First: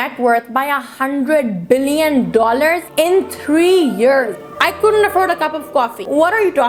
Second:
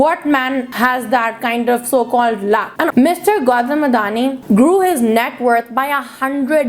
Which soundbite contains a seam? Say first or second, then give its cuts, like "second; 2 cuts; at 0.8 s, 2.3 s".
second; 1 cut; at 2.9 s